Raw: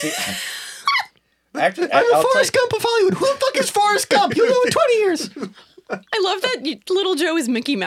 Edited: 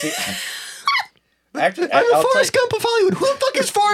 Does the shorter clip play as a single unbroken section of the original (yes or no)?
yes